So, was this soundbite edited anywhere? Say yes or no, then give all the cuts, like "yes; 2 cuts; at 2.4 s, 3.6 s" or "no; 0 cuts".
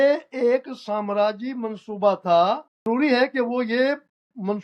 yes; 1 cut; at 2.7 s